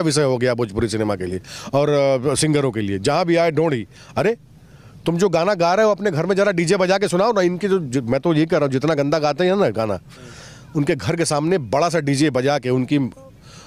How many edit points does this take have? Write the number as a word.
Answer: zero